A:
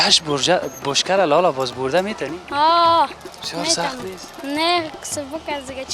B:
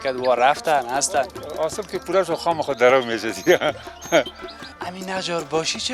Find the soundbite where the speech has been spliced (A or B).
B